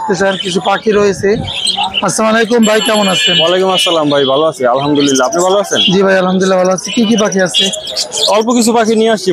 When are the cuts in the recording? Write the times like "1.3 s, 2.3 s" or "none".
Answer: none